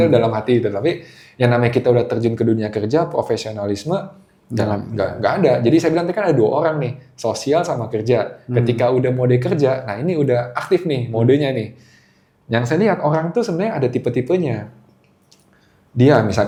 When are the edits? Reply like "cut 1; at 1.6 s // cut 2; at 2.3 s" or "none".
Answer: none